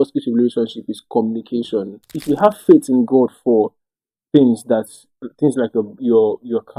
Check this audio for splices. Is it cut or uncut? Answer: cut